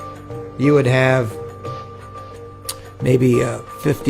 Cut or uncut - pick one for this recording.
cut